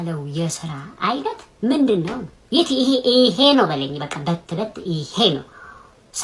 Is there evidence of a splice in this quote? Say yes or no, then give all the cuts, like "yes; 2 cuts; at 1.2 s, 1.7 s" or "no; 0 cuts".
no; 0 cuts